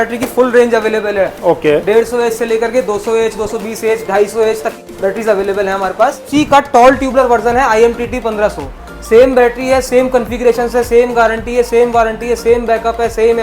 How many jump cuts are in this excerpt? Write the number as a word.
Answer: two